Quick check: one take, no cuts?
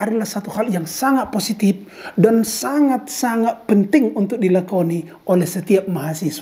yes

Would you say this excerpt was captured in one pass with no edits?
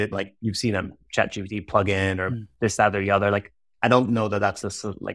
no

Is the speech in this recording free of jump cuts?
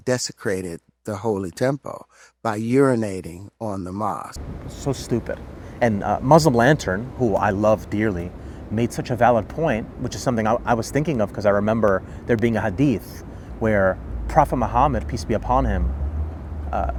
yes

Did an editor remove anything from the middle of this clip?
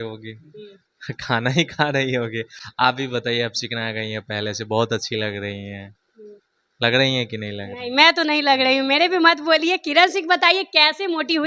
no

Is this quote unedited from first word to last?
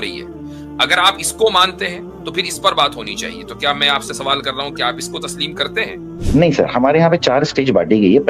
no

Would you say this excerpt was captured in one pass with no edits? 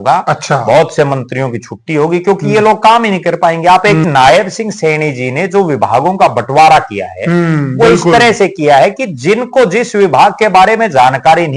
no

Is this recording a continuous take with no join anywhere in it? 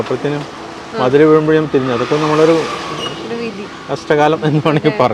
yes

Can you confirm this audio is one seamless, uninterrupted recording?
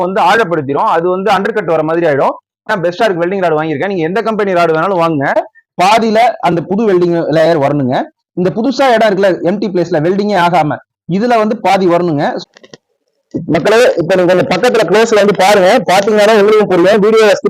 no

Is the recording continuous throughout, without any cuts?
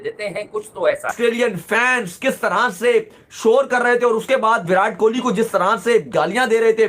no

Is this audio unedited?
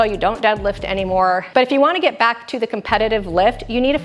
no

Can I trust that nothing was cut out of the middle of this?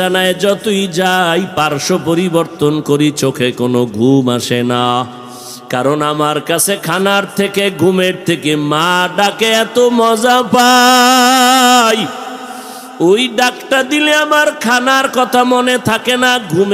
yes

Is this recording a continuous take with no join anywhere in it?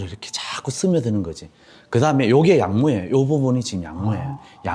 yes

